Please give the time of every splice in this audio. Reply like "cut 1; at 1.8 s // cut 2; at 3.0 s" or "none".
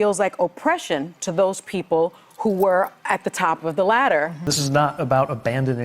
cut 1; at 4.4 s